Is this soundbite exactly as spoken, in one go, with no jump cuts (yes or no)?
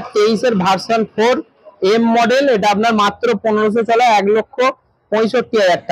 yes